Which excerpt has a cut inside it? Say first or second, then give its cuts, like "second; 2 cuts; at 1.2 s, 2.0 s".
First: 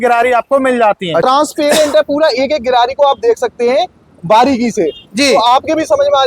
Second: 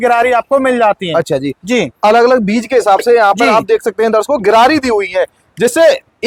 first; 1 cut; at 1.2 s